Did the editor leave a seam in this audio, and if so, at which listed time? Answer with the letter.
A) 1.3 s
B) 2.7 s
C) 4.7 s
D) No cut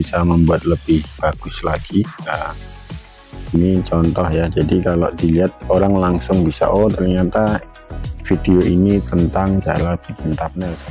D